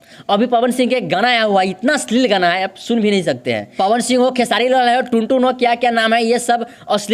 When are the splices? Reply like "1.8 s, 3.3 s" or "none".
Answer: 3.7 s